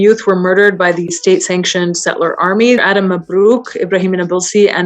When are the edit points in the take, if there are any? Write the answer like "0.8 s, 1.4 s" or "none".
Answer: 2.8 s

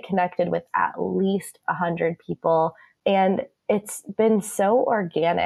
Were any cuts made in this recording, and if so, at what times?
2.4 s

